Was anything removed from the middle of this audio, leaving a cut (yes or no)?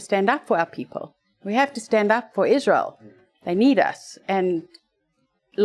no